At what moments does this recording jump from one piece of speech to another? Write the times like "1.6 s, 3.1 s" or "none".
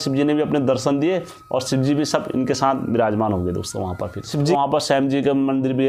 4.5 s